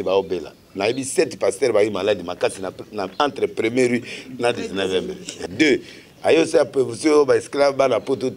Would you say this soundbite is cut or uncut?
cut